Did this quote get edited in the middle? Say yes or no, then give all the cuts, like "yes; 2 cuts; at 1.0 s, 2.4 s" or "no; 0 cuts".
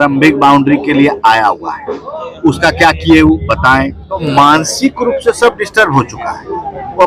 yes; 1 cut; at 4.2 s